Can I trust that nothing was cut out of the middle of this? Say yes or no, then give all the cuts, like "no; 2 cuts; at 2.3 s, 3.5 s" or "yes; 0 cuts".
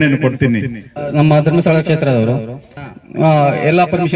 no; 1 cut; at 1.0 s